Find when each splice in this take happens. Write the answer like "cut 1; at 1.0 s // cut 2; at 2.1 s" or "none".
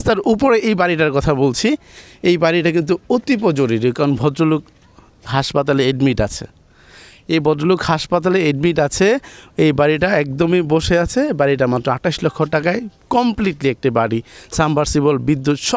none